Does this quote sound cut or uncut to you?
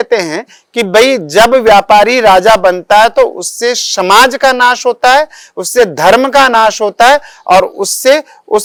uncut